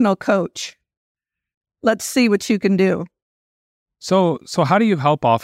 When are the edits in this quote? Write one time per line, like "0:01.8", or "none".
0:03.5